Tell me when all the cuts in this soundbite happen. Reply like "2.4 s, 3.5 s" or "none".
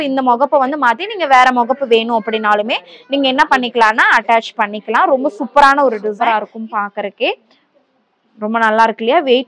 6.2 s